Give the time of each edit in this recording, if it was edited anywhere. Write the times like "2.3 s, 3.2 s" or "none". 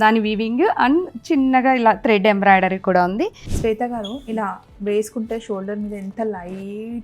3.4 s